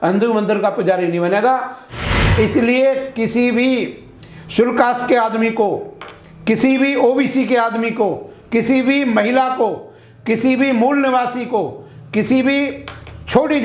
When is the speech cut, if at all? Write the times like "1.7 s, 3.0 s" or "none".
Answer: 2.0 s